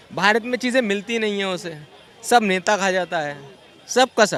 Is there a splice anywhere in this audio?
no; 0 cuts

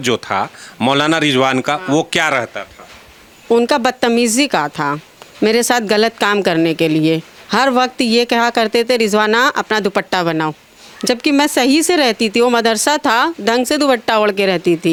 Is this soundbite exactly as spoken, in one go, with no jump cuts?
yes; 0 cuts

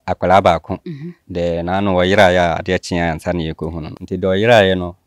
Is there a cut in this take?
yes; 1 cut; at 3.9 s

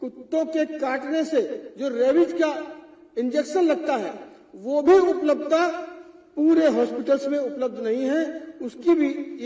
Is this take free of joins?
yes; 0 cuts

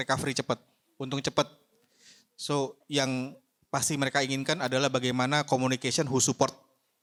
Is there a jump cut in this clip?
no; 0 cuts

